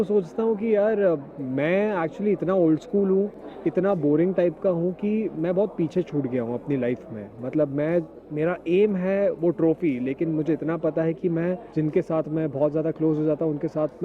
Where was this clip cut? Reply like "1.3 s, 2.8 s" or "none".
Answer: 7.3 s, 11.7 s